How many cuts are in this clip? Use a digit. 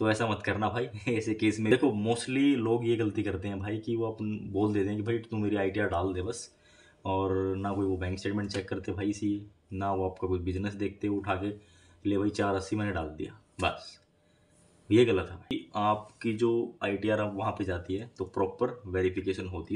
2